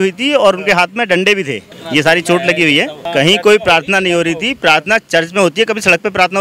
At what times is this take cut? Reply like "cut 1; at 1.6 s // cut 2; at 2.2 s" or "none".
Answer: cut 1; at 1.7 s // cut 2; at 3.0 s